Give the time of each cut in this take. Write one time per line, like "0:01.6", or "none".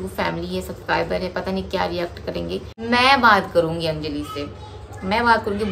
0:02.7